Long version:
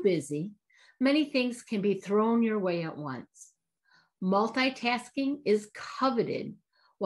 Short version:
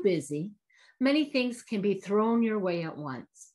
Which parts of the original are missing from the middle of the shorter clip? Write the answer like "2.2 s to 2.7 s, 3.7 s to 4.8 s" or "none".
none